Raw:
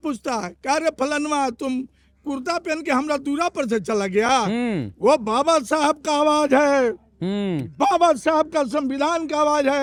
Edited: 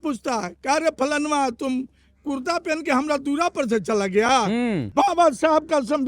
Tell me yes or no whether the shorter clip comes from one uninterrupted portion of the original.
no